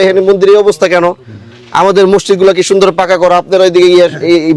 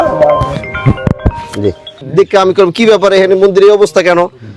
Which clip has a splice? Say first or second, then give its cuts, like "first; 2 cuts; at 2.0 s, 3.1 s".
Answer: second; 1 cut; at 2.1 s